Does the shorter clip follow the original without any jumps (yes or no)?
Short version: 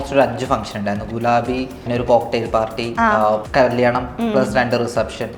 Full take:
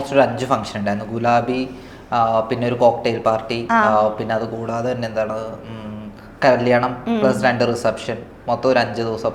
no